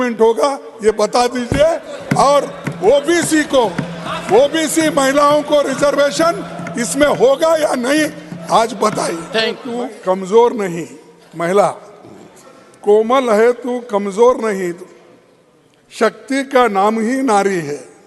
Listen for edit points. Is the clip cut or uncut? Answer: cut